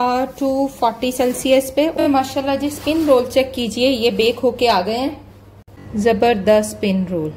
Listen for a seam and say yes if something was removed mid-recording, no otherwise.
yes